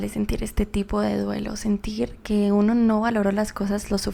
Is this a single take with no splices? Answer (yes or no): yes